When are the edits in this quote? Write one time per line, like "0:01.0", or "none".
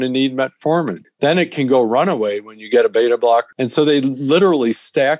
0:01.1
0:03.5